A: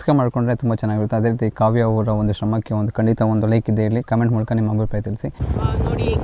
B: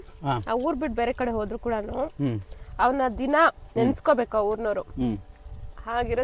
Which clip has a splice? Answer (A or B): A